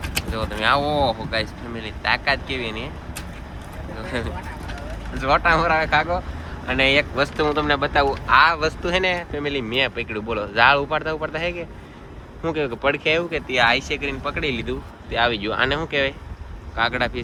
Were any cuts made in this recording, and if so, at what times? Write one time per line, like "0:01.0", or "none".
none